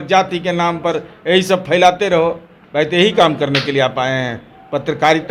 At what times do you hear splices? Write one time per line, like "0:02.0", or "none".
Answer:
none

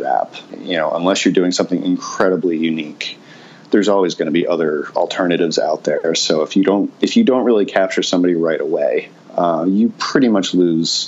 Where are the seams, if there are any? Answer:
0:09.2

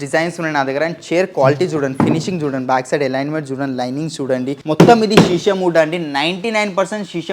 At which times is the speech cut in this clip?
0:04.6

